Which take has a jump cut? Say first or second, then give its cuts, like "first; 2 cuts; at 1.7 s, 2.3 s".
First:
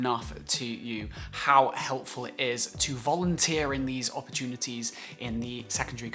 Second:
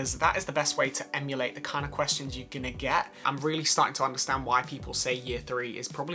second; 1 cut; at 3.2 s